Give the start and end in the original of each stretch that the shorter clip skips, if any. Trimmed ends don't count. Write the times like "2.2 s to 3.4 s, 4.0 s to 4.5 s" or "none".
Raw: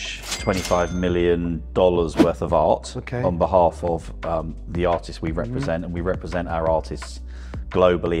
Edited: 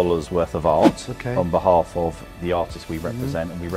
4.1 s to 4.6 s